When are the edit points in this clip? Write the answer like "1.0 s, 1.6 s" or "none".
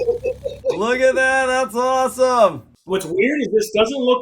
2.7 s